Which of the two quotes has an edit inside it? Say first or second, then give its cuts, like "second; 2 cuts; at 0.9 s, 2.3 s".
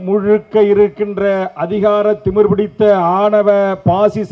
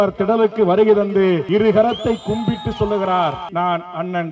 second; 2 cuts; at 1.4 s, 3.5 s